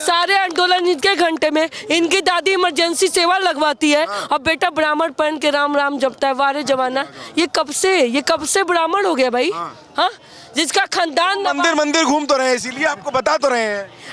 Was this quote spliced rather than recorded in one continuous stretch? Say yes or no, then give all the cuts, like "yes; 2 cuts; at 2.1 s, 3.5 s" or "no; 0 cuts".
no; 0 cuts